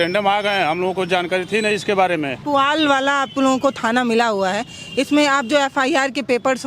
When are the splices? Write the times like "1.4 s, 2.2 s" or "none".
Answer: 2.4 s